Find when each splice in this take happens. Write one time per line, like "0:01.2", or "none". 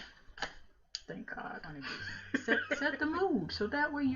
0:02.5